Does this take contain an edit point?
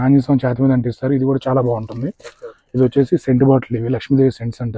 no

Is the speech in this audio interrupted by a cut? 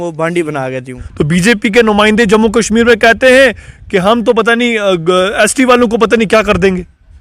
yes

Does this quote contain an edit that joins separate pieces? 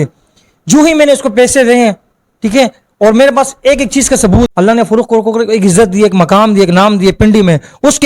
yes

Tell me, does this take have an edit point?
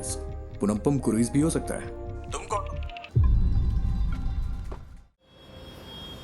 yes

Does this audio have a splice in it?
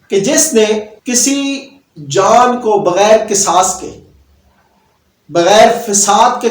yes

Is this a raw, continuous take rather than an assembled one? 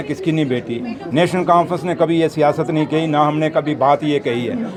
yes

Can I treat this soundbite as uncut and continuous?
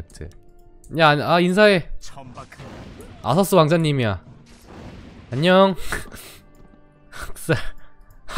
yes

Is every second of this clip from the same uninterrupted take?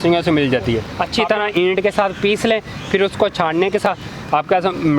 no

